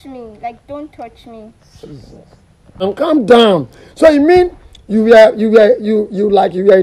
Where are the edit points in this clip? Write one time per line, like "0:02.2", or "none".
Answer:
0:02.9